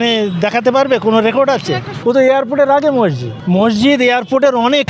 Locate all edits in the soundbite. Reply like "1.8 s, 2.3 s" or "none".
1.9 s, 3.3 s